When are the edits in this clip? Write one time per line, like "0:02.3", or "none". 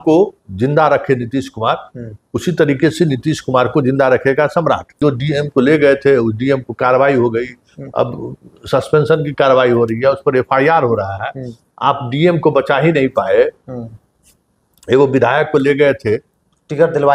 0:04.9